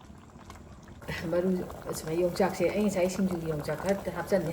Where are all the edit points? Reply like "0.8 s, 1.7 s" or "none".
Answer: 1.2 s